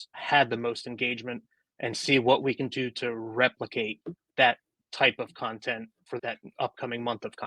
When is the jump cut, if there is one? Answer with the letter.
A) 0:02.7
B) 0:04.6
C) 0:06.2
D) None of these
C